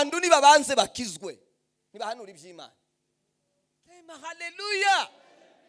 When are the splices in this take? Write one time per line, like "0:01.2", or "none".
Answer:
0:04.1